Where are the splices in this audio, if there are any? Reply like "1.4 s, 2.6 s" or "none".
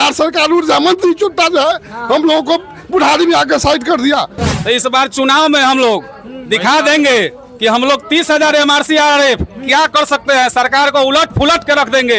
4.4 s